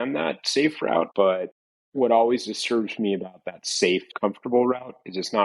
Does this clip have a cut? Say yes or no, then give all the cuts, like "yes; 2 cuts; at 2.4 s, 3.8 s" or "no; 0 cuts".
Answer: yes; 1 cut; at 1.3 s